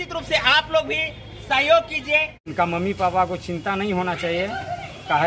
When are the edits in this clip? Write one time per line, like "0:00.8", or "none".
0:02.4